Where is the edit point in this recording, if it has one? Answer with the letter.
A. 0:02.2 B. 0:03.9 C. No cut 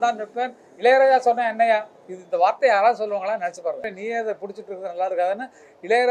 B